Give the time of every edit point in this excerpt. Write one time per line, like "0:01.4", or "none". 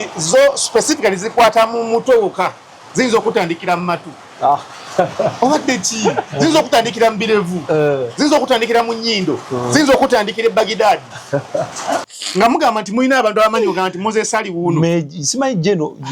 0:12.1